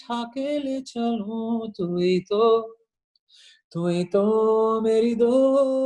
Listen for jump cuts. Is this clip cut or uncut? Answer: uncut